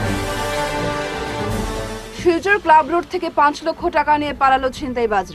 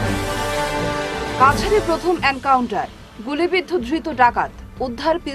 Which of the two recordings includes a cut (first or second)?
first